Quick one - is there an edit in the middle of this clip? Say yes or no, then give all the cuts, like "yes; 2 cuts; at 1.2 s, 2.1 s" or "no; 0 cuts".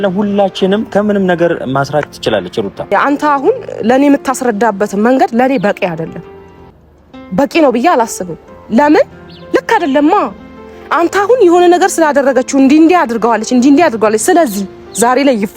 yes; 1 cut; at 2.9 s